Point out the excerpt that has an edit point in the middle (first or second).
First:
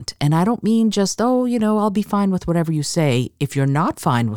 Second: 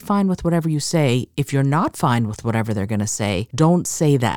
second